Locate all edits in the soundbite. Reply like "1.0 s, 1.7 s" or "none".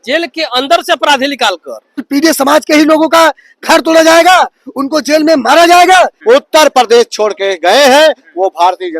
2.1 s, 6.2 s